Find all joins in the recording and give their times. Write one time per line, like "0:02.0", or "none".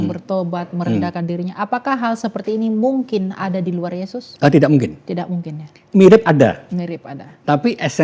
0:04.2
0:05.7